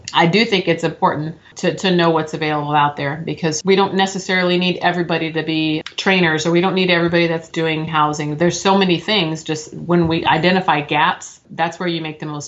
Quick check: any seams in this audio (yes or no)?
yes